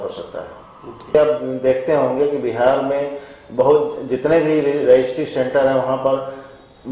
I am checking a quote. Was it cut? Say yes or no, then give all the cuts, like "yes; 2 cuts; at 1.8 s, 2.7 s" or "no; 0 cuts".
yes; 1 cut; at 1.1 s